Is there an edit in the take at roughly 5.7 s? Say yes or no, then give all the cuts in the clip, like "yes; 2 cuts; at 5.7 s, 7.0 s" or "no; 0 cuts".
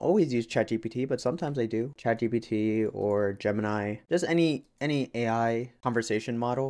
no; 0 cuts